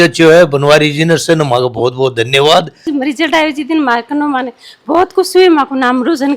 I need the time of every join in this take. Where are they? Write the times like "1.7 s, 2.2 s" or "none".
2.8 s